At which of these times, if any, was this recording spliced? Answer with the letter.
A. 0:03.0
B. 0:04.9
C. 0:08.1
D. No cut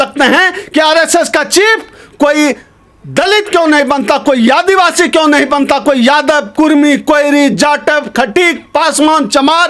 D